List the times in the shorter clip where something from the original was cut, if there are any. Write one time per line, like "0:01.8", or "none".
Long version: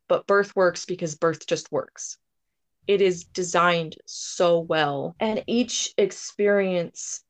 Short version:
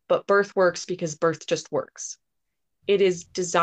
none

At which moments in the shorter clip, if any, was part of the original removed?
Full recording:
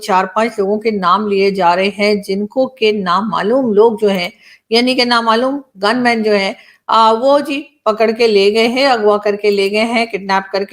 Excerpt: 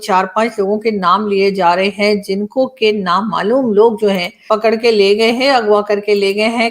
0:04.3

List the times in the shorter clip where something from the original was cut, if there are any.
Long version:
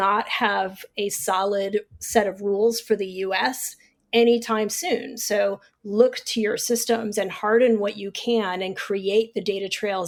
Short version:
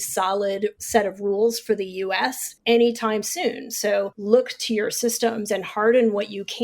0:00.8
0:02.5
0:04.2

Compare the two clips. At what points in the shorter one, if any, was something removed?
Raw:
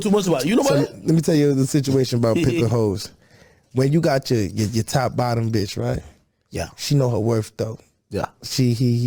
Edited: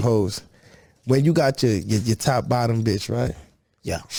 none

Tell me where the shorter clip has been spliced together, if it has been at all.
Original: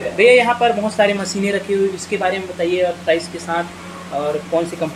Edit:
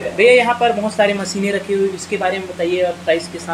none

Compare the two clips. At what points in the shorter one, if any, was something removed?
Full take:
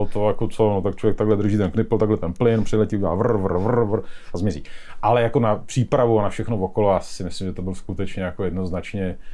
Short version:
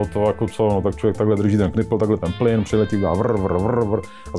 none

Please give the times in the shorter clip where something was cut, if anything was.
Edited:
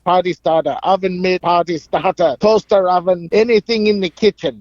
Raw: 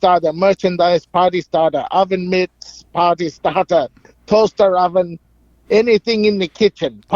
0:01.4
0:02.4
0:03.2

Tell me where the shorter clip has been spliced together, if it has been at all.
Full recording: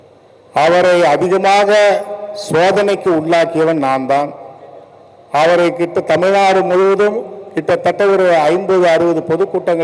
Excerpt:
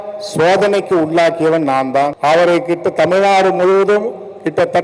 0:02.1

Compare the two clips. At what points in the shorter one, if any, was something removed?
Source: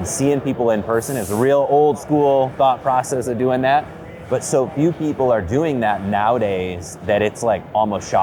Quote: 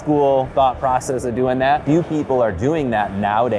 0:01.8

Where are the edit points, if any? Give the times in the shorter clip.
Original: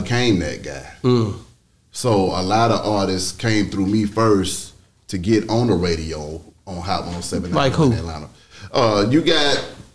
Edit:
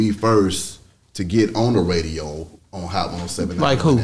none

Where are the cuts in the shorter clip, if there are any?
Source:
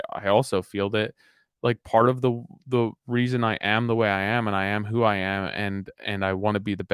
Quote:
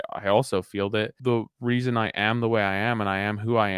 0:01.1

